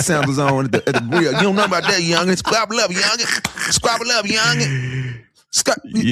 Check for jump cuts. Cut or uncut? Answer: uncut